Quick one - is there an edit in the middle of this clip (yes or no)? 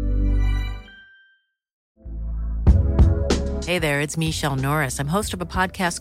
yes